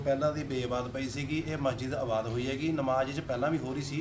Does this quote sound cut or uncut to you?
uncut